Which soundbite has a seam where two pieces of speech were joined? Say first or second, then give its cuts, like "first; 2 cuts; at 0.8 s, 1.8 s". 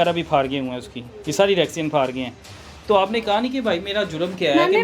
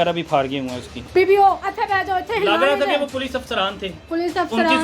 second; 1 cut; at 0.9 s